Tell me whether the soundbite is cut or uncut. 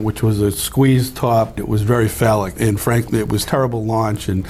cut